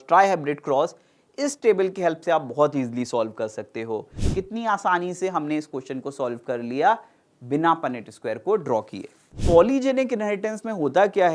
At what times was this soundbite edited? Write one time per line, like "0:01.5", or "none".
0:04.2
0:09.3